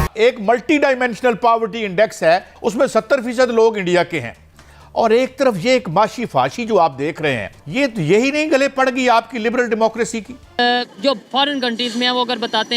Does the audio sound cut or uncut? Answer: cut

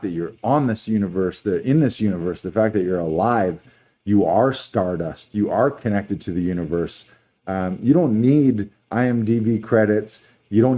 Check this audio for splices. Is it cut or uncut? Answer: uncut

